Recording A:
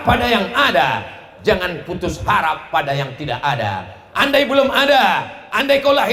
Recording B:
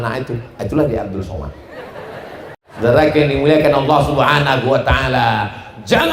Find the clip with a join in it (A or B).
B